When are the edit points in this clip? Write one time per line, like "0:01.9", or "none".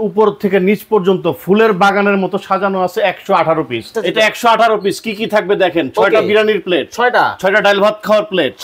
0:03.9